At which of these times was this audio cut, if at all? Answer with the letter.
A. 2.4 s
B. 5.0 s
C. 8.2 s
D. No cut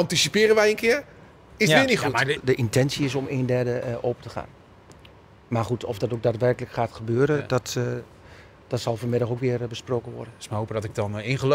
A